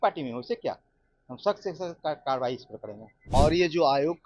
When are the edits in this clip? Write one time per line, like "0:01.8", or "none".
0:03.1